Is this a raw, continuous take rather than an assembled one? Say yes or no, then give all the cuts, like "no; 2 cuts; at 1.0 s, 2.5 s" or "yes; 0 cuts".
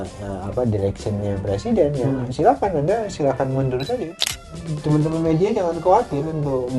no; 1 cut; at 4.1 s